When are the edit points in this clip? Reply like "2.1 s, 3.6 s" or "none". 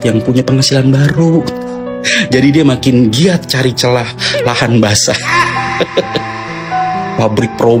none